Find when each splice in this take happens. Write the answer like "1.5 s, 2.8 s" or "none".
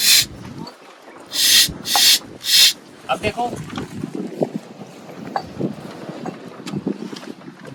none